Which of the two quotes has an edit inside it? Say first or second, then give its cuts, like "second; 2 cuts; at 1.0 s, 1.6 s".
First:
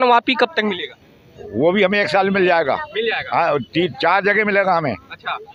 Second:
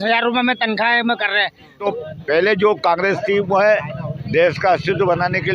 second; 1 cut; at 1.8 s